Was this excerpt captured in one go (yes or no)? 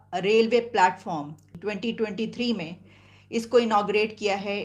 no